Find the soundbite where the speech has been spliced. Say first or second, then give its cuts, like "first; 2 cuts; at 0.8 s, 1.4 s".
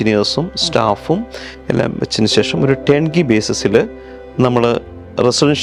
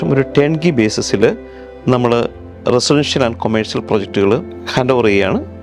second; 1 cut; at 4.6 s